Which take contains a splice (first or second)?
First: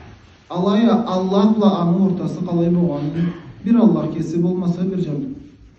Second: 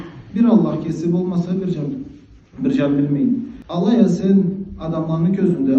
second